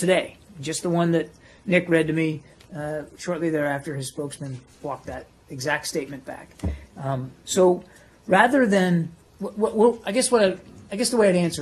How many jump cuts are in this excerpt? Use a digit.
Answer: 1